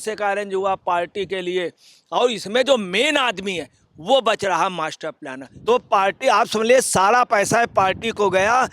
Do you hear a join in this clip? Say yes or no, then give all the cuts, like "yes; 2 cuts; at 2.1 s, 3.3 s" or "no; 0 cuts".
yes; 1 cut; at 5.5 s